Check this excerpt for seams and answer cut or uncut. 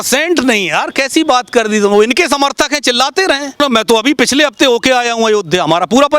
cut